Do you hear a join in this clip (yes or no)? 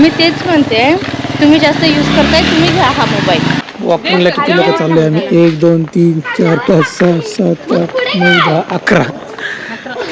yes